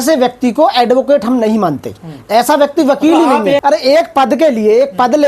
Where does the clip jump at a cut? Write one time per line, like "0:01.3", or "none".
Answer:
0:03.6